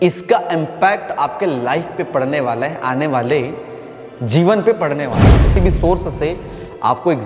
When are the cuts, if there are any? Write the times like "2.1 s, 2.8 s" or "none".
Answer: 5.5 s